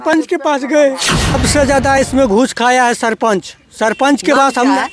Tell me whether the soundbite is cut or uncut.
cut